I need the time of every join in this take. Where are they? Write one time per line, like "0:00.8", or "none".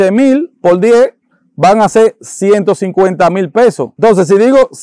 0:03.9